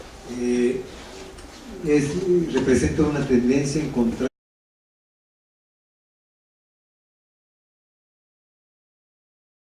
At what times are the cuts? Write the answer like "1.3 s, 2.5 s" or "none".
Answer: none